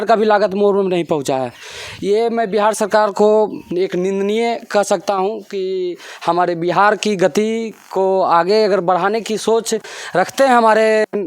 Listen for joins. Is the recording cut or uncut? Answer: uncut